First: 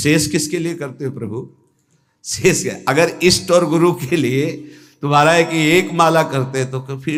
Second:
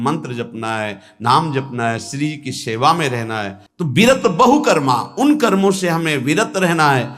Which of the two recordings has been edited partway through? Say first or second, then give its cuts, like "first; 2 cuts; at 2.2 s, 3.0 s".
second; 1 cut; at 3.6 s